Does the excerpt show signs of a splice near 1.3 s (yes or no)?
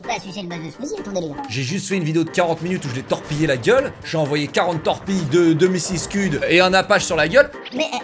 yes